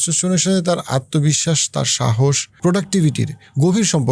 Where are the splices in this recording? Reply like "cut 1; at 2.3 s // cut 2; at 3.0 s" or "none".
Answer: cut 1; at 2.6 s